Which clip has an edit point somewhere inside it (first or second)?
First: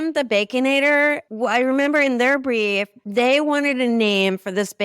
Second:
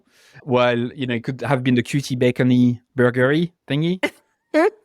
first